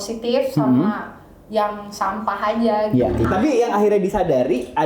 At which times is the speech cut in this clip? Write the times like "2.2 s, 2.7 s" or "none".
3.3 s